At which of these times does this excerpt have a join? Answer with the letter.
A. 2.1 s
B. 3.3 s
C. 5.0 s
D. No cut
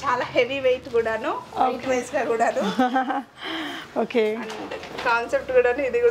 D